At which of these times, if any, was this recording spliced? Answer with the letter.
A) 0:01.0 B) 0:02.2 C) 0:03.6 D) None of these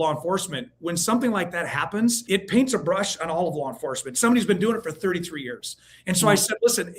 B